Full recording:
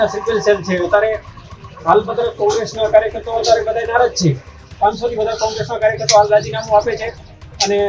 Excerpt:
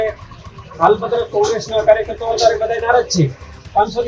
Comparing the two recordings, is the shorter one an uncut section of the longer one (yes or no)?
yes